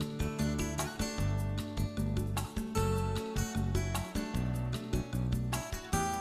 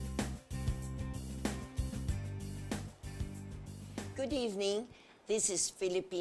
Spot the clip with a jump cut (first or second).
first